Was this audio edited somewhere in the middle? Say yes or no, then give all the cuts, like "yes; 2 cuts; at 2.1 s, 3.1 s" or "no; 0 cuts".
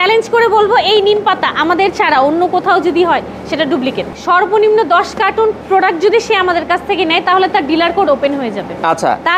yes; 1 cut; at 4.1 s